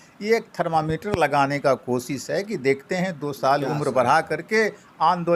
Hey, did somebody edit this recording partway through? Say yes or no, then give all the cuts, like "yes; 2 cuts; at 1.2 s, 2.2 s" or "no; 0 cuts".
no; 0 cuts